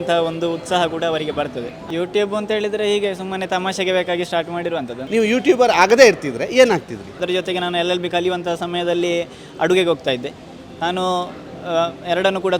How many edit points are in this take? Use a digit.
3